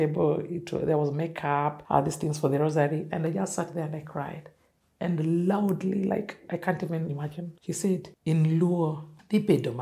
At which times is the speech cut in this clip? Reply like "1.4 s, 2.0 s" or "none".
1.8 s